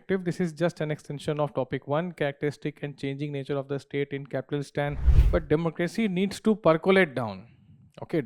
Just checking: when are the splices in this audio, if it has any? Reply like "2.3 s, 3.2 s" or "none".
5.1 s